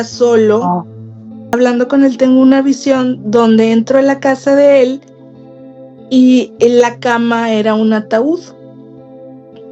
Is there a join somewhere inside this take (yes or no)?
yes